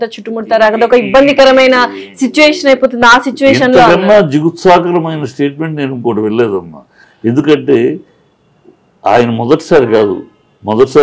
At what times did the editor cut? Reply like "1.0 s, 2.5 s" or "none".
none